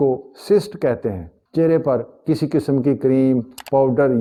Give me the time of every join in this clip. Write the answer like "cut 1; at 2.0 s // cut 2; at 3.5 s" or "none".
none